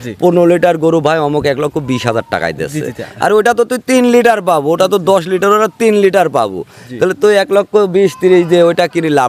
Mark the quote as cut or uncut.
uncut